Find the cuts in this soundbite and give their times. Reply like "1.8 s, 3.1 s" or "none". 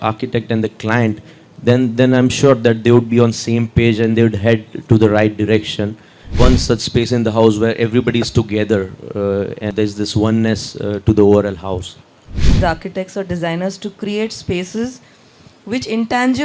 6.4 s, 9.7 s, 12.6 s

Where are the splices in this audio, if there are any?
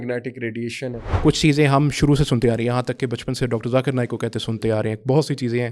1.0 s

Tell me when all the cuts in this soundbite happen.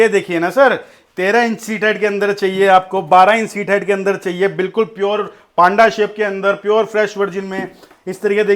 none

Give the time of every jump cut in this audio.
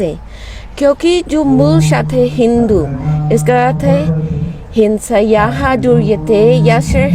none

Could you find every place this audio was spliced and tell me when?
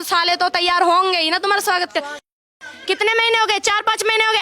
2.3 s

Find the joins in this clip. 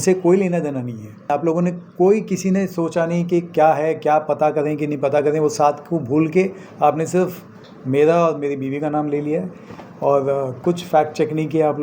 1.3 s

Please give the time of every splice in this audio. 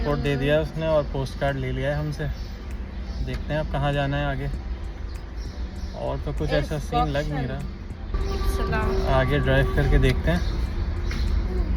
none

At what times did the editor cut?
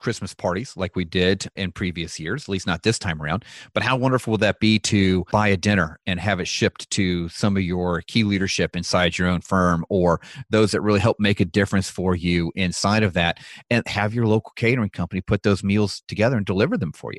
1.5 s, 5.3 s

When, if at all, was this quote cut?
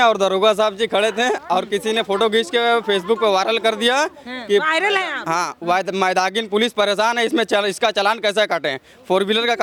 none

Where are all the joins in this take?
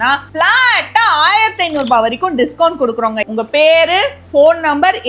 3.2 s

